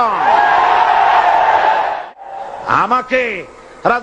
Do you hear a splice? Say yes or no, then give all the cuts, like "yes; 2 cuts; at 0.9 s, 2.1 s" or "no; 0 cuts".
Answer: yes; 1 cut; at 2.0 s